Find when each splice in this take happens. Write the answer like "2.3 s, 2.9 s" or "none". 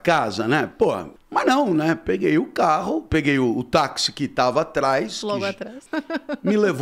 1.1 s, 5.8 s

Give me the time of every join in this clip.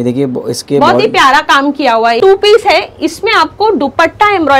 2.2 s

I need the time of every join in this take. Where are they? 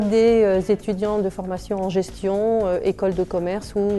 1.6 s

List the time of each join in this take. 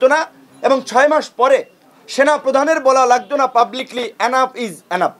none

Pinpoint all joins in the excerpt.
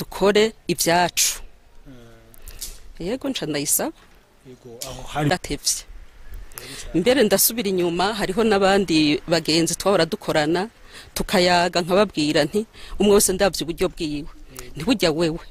5.3 s

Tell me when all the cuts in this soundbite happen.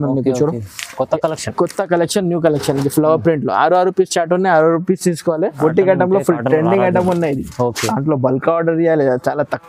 5.5 s

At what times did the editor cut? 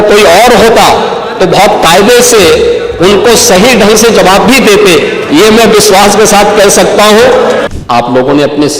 7.7 s

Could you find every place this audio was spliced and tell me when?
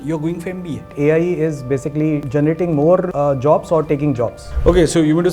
0.9 s, 2.2 s, 3.1 s, 4.4 s

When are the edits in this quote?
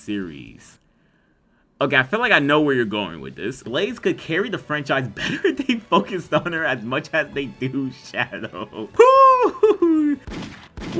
3.6 s, 8.8 s

